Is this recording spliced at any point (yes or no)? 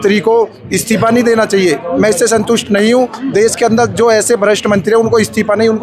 no